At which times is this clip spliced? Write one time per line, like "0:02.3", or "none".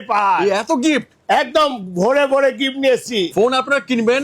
0:03.3